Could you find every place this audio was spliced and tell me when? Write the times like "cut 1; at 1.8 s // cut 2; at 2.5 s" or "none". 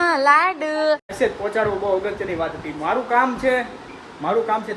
cut 1; at 1.1 s

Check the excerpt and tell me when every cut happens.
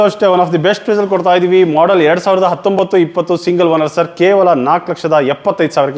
none

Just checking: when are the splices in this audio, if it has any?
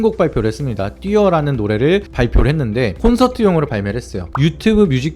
cut 1; at 4.2 s

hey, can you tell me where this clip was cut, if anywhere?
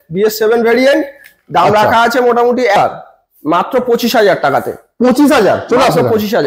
cut 1; at 2.8 s

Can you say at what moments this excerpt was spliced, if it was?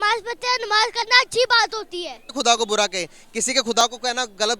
cut 1; at 2.3 s

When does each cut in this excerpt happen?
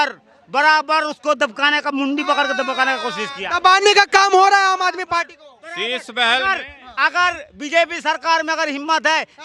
none

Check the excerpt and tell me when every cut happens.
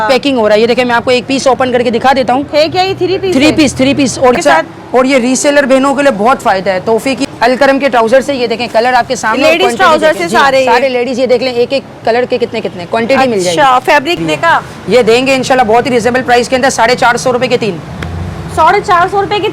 cut 1; at 4.4 s // cut 2; at 7.2 s // cut 3; at 14.2 s

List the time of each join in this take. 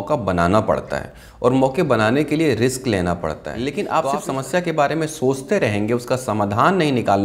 cut 1; at 3.9 s

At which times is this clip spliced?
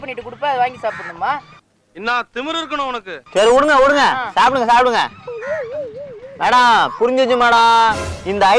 none

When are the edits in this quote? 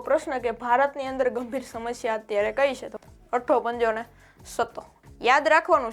cut 1; at 2.9 s // cut 2; at 4.9 s

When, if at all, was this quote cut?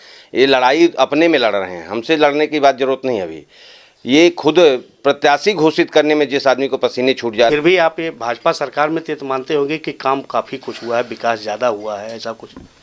cut 1; at 7.5 s

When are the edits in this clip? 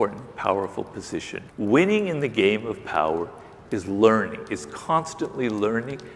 cut 1; at 1.4 s

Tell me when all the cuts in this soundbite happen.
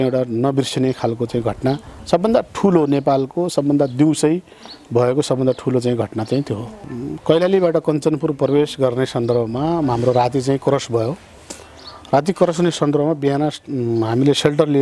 cut 1; at 6.8 s

